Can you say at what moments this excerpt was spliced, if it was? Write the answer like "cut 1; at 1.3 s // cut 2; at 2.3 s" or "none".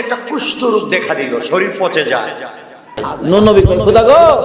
cut 1; at 3.1 s

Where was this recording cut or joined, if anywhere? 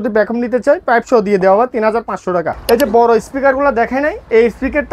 cut 1; at 2.5 s

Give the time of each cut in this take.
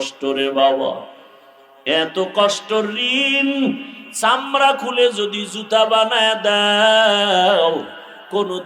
none

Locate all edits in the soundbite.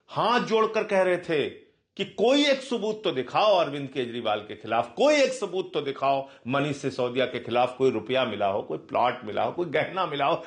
none

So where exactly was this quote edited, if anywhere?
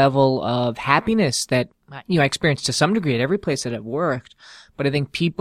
cut 1; at 1.8 s

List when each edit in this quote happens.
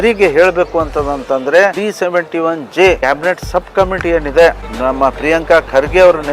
cut 1; at 1.8 s // cut 2; at 3.0 s // cut 3; at 4.7 s

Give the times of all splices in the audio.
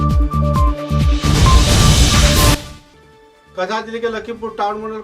cut 1; at 2.5 s

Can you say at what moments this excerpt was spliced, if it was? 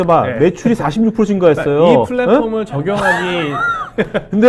none

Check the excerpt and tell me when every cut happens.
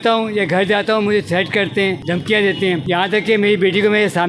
cut 1; at 2.0 s // cut 2; at 2.8 s

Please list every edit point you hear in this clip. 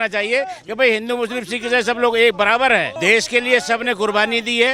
cut 1; at 2.9 s

